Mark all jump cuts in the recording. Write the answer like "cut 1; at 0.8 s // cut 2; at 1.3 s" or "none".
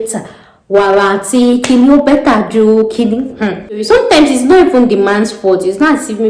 cut 1; at 3.8 s